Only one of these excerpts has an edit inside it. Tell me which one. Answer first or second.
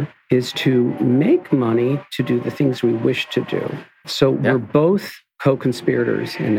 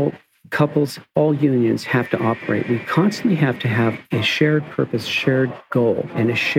first